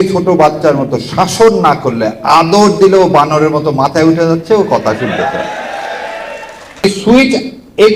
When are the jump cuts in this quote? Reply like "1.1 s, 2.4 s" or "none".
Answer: 6.8 s